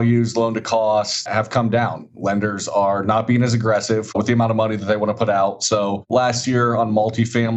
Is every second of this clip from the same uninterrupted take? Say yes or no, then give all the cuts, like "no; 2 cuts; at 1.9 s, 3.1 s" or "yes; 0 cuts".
no; 2 cuts; at 1.2 s, 6.1 s